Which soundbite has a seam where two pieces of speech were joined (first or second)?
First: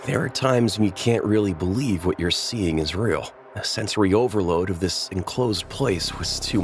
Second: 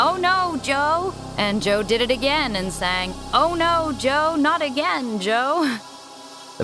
second